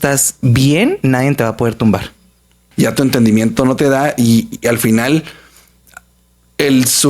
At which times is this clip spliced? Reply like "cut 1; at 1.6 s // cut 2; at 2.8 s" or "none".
cut 1; at 2.6 s